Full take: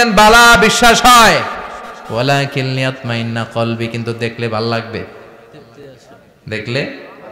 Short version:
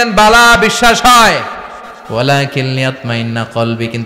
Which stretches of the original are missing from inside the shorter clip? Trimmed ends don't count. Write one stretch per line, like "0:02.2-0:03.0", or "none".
none